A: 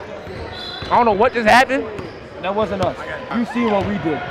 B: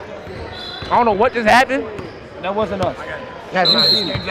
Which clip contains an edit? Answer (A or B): A